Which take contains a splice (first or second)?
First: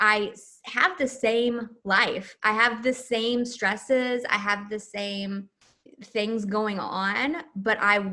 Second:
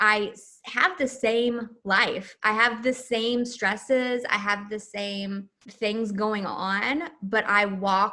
second